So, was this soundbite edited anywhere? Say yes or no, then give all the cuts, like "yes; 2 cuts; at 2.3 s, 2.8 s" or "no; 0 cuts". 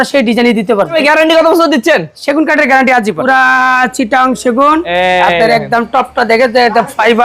yes; 2 cuts; at 1.0 s, 3.3 s